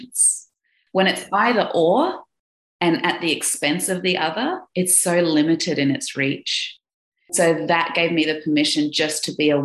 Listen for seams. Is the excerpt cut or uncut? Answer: cut